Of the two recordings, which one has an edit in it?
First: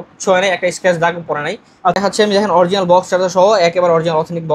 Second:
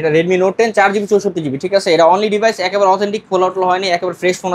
first; 1 cut; at 1.9 s

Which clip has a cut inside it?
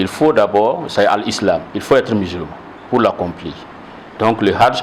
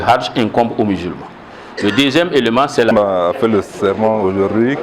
second; 1 cut; at 2.9 s

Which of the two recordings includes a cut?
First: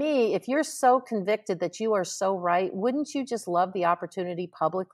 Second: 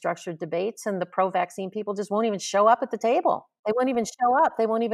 second; 1 cut; at 3.5 s

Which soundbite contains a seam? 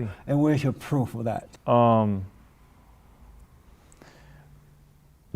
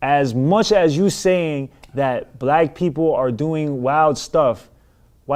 first; 1 cut; at 1.5 s

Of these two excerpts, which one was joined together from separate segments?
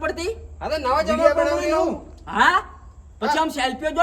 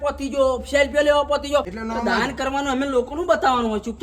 second; 1 cut; at 1.7 s

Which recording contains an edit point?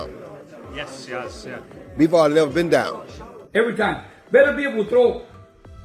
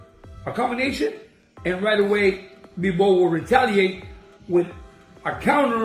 first; 1 cut; at 3.4 s

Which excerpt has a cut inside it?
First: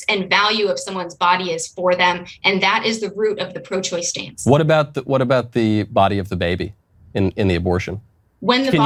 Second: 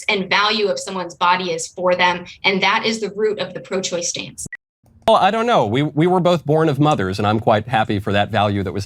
second; 1 cut; at 4.3 s

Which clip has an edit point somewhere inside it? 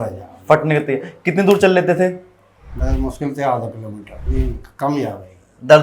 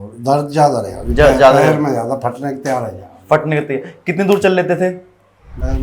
first; 1 cut; at 4.2 s

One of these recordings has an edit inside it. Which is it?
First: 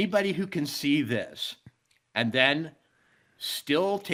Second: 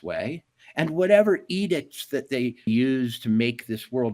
second; 1 cut; at 2.7 s

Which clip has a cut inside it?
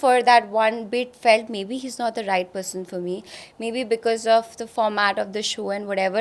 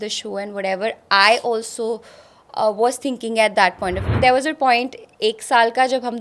second; 1 cut; at 4.1 s

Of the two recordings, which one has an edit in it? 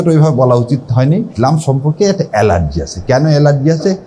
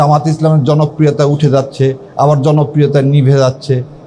first; 1 cut; at 1.3 s

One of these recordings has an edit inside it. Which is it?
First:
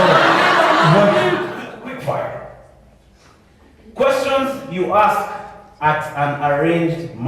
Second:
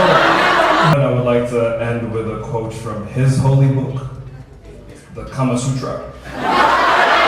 second; 1 cut; at 0.9 s

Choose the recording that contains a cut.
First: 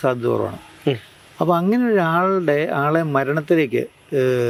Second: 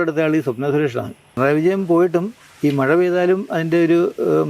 second; 1 cut; at 1.3 s

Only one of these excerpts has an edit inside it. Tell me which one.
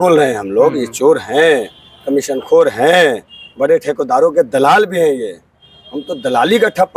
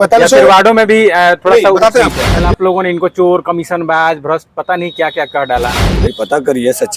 second; 2 cuts; at 2.3 s, 5.8 s

